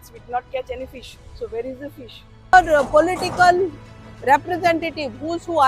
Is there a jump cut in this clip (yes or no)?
yes